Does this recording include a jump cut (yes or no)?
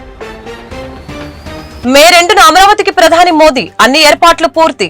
yes